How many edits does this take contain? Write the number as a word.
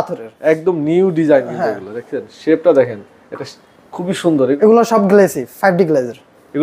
one